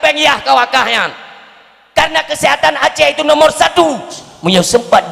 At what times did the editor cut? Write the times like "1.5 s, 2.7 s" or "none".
4.2 s